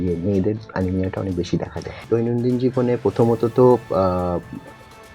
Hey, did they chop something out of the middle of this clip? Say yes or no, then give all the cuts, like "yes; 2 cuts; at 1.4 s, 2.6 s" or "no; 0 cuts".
yes; 1 cut; at 2.0 s